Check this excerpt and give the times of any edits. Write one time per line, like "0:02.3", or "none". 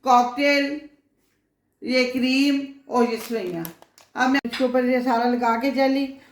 0:04.4